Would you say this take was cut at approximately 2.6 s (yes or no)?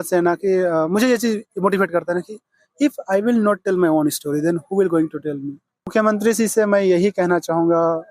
no